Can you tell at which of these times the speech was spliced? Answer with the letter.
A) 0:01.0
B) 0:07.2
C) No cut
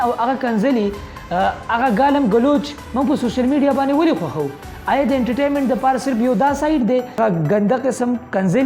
B